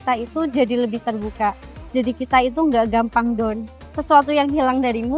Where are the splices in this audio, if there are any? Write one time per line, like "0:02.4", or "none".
0:03.7